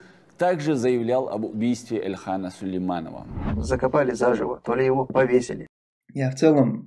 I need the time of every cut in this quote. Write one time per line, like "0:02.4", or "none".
0:05.6